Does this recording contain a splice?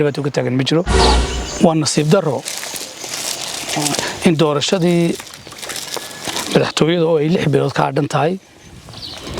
yes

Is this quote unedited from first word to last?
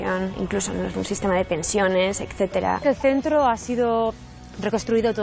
no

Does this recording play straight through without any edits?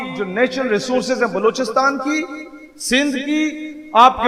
yes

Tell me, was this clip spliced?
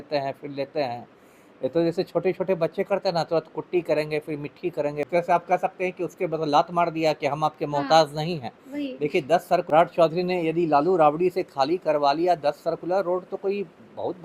yes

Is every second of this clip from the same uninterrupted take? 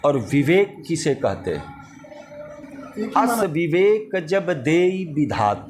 no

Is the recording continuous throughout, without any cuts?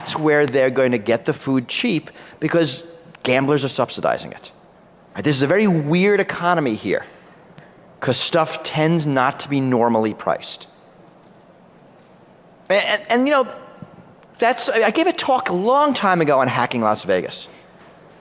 no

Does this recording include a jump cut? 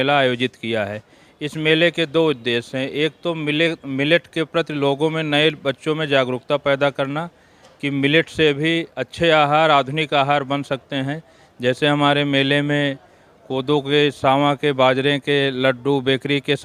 no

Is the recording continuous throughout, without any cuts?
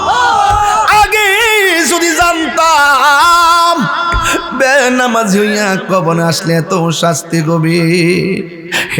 yes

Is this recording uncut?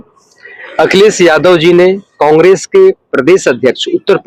yes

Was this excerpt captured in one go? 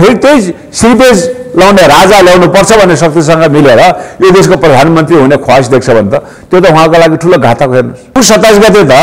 no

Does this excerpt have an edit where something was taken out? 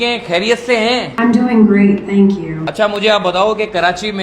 yes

